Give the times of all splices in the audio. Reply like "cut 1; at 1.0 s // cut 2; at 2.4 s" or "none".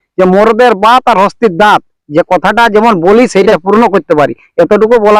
cut 1; at 3.5 s